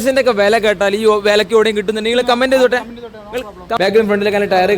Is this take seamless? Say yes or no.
no